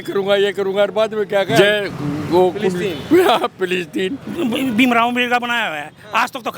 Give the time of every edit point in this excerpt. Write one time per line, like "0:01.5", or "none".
0:01.6
0:04.2